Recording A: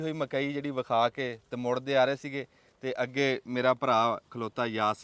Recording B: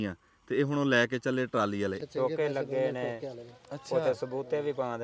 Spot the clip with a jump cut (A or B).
B